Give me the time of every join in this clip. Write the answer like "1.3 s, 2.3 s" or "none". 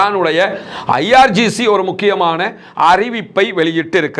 none